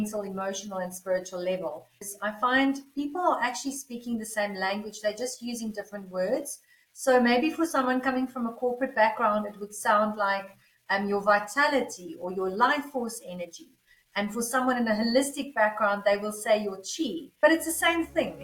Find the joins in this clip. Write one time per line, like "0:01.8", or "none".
0:02.1
0:17.4